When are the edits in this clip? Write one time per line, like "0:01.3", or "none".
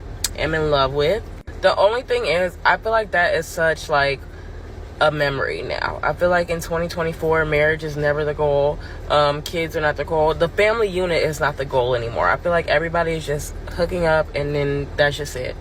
0:10.2